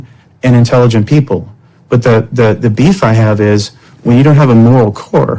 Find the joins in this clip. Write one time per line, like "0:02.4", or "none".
none

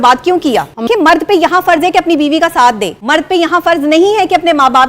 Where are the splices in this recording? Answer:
0:00.8
0:02.9

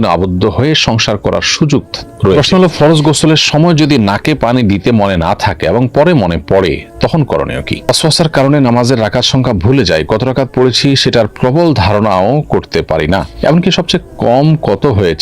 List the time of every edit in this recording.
0:02.4
0:07.9

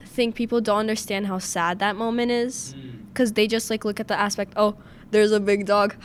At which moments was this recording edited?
none

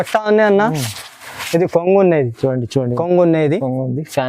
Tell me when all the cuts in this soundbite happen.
0:03.0

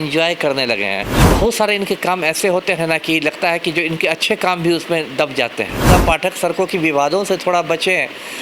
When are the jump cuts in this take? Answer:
0:01.2
0:05.9

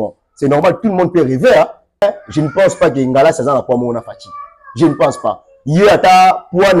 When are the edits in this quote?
0:02.0

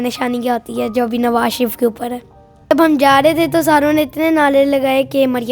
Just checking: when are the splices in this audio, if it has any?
0:02.7

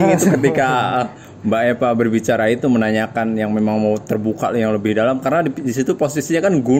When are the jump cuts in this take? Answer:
none

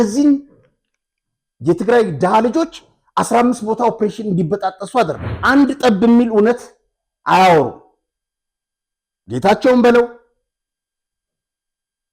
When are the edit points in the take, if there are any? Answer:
0:05.3

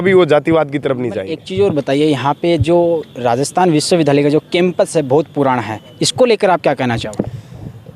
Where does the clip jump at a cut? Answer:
0:01.1

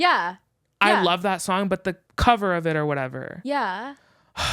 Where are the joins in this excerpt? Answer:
0:02.1

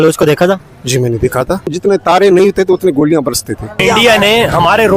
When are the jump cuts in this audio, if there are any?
0:01.8
0:03.8

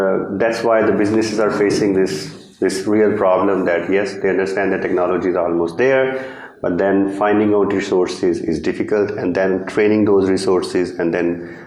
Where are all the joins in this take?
none

